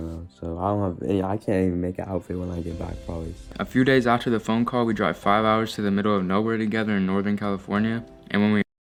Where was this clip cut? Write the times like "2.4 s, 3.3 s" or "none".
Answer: none